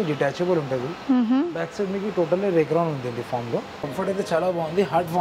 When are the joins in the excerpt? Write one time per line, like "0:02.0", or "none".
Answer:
0:03.8